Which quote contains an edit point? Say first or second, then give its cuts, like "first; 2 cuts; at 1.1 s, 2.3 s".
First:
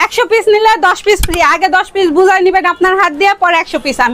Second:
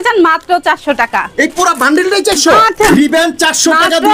second; 1 cut; at 2.9 s